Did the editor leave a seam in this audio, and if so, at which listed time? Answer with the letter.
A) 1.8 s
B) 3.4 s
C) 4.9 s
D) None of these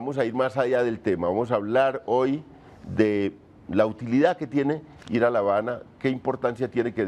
B